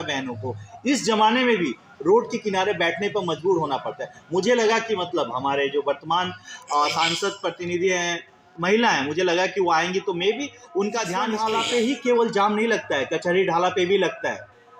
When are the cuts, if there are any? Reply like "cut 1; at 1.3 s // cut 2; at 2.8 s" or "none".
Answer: cut 1; at 11.3 s